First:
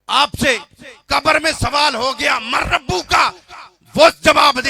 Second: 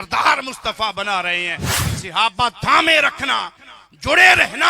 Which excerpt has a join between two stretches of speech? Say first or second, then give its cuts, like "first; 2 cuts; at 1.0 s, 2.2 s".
second; 1 cut; at 1.7 s